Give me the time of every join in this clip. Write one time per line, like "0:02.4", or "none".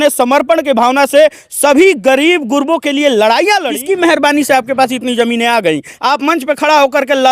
0:03.7